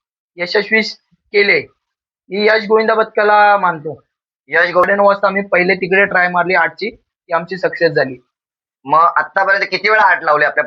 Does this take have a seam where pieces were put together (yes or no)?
yes